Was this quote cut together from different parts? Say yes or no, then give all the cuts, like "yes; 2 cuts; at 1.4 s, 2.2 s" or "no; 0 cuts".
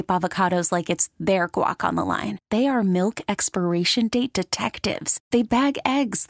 no; 0 cuts